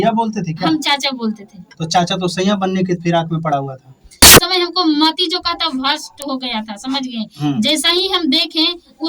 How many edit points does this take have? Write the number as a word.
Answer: one